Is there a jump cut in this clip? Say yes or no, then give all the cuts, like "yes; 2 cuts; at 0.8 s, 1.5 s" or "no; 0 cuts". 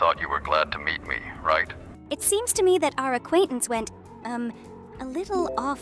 no; 0 cuts